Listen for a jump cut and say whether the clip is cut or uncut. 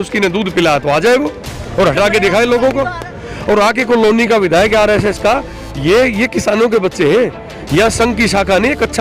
cut